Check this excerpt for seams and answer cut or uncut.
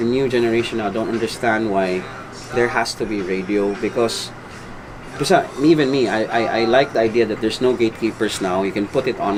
uncut